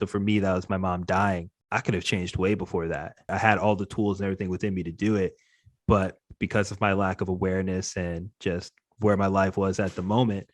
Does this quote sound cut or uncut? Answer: cut